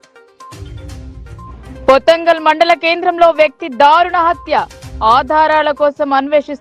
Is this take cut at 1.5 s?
yes; 1 cut; at 1.5 s

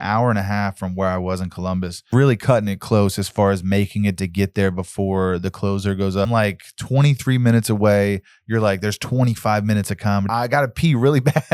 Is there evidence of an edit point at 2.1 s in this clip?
yes; 3 cuts; at 2.1 s, 6.3 s, 10.3 s

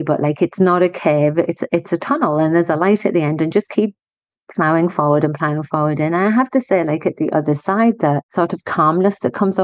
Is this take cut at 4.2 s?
no; 1 cut; at 8.3 s

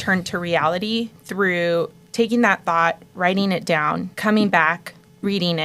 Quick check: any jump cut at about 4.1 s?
yes; 1 cut; at 4.1 s

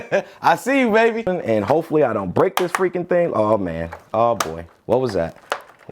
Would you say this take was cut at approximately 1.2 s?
yes; 1 cut; at 1.2 s

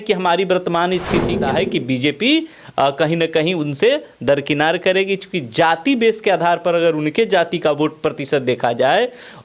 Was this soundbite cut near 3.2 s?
no; 1 cut; at 1.4 s

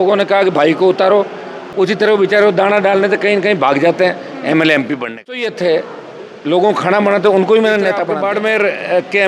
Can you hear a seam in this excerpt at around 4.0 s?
no; 3 cuts; at 1.6 s, 5.5 s, 8.0 s

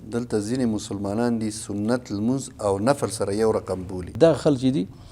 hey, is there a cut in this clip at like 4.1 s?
yes; 1 cut; at 4.1 s

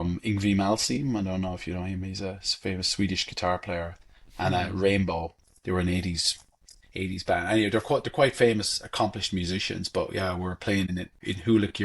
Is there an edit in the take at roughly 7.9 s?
no; 1 cut; at 10.9 s

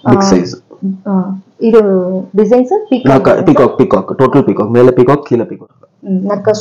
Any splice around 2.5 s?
no; 1 cut; at 5.6 s

